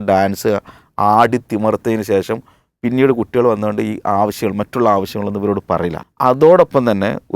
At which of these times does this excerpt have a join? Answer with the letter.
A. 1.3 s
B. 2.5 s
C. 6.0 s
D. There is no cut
C